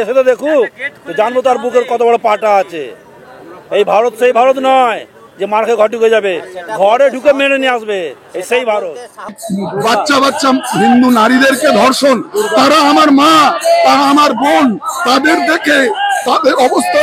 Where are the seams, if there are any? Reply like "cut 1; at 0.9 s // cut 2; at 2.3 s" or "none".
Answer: cut 1; at 9.4 s